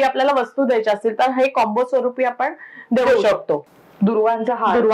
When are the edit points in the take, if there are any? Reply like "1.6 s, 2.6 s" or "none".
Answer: 3.7 s